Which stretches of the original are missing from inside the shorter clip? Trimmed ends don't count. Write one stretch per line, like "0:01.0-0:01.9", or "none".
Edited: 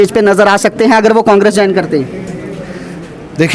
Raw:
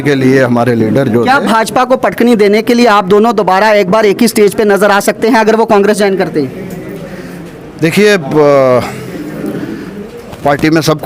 none